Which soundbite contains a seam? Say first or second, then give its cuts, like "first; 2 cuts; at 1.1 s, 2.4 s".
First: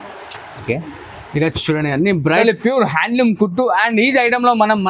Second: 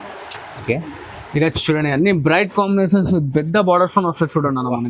first; 1 cut; at 2.4 s